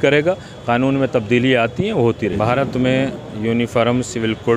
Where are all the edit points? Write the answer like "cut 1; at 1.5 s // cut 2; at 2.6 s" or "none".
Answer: cut 1; at 2.6 s